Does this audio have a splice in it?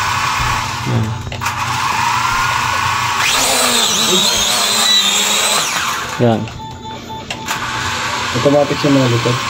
no; 0 cuts

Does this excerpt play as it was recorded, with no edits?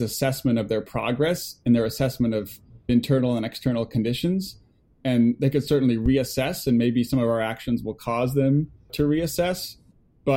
yes; 0 cuts

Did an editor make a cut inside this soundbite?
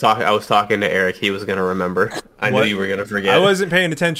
no; 0 cuts

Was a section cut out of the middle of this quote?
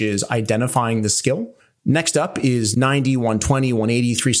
yes; 2 cuts; at 1.6 s, 2.7 s

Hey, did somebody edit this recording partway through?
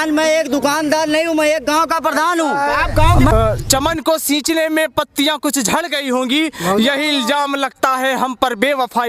yes; 1 cut; at 3.3 s

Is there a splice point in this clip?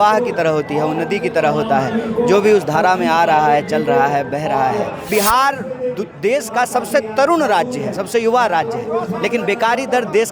yes; 1 cut; at 5.0 s

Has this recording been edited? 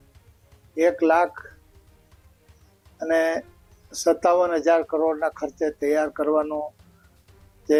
no; 0 cuts

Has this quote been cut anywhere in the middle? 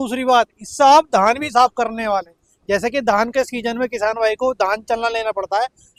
no; 0 cuts

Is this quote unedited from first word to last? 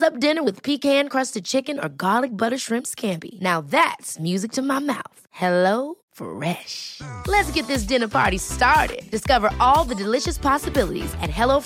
yes; 0 cuts

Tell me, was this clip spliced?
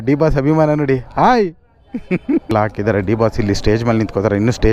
yes; 1 cut; at 2.5 s

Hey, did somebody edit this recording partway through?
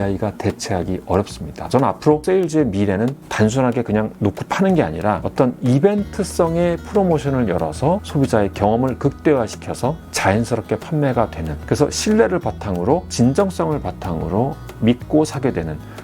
yes; 2 cuts; at 1.5 s, 3.2 s

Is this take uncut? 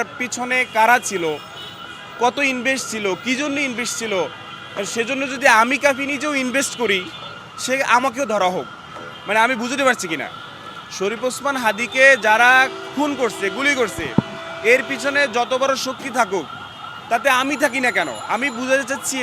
yes; 0 cuts

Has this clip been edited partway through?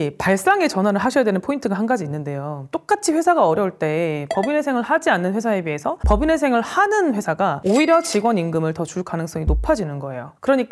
yes; 1 cut; at 2.7 s

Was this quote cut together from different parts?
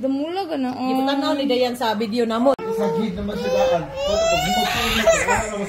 yes; 1 cut; at 2.6 s

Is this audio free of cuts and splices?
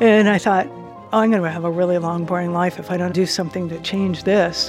no; 1 cut; at 3.1 s

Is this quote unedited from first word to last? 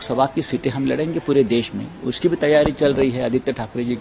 yes; 0 cuts

